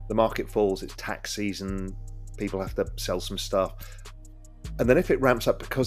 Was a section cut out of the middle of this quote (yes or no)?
no